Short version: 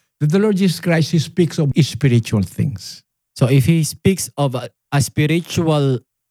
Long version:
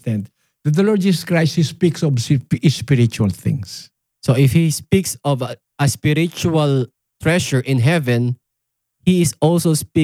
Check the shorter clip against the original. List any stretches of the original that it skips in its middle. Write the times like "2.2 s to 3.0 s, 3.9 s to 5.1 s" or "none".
2.2 s to 2.6 s